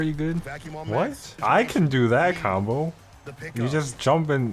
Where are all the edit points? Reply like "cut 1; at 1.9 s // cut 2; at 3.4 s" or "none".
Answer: cut 1; at 1.3 s